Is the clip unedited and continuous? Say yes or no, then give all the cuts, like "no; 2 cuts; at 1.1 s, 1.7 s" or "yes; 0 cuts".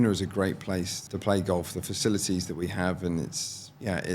no; 1 cut; at 1.0 s